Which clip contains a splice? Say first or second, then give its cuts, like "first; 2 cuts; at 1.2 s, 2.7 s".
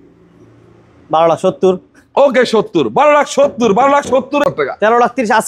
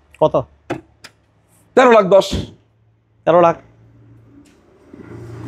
first; 1 cut; at 4.4 s